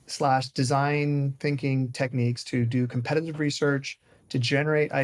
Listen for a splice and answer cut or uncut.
uncut